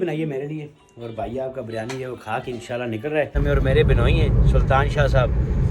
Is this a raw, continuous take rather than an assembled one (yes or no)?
no